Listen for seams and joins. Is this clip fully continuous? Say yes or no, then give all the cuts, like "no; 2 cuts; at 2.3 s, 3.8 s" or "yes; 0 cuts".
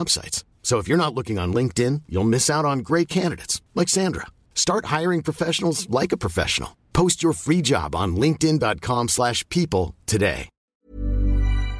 no; 1 cut; at 10.5 s